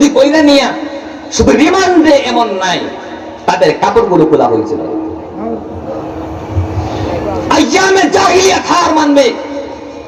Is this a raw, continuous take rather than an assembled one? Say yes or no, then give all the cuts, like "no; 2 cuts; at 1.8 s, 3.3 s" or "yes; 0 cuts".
yes; 0 cuts